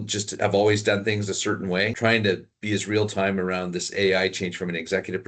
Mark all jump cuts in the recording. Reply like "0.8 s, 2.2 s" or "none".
1.9 s, 2.5 s